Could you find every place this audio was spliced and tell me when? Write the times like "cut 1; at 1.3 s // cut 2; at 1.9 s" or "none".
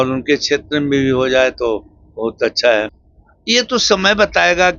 cut 1; at 3.0 s